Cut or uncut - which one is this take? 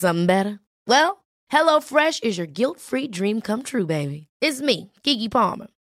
uncut